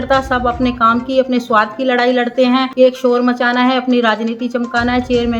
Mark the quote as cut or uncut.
cut